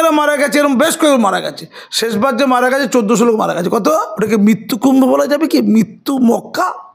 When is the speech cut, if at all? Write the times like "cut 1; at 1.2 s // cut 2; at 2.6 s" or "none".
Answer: cut 1; at 4.1 s